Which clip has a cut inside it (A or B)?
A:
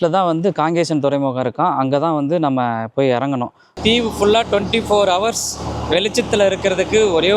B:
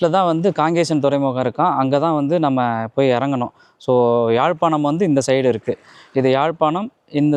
A